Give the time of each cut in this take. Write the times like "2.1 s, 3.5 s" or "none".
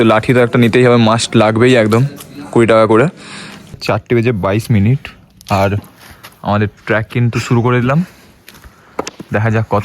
3.8 s